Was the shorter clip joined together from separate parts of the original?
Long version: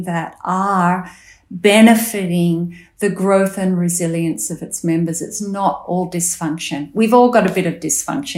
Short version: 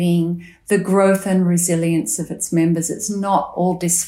no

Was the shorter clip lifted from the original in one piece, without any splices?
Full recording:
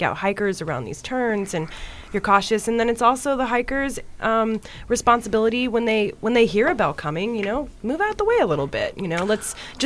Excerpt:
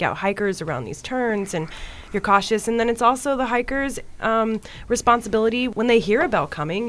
no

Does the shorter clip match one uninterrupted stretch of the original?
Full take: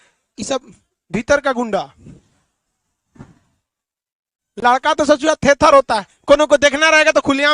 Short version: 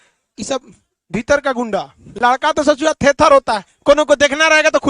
no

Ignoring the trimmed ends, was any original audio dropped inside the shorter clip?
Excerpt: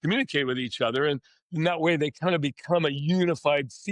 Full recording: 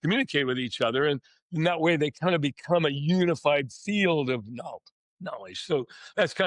no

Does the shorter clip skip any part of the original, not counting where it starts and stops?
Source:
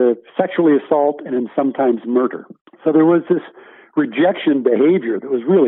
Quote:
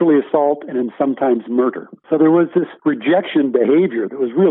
yes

